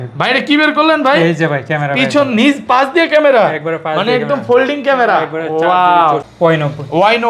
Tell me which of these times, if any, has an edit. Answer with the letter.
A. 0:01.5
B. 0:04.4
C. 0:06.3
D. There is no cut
C